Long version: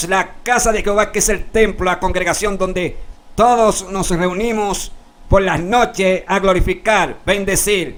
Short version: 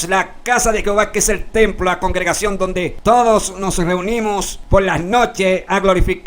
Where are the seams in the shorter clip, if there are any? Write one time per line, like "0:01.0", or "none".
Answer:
0:02.9
0:04.5